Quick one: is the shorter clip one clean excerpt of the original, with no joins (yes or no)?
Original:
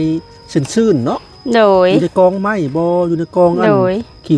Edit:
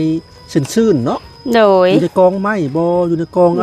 yes